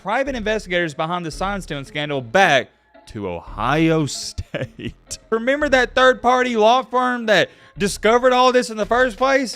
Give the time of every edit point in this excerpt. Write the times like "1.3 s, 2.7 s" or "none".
5.3 s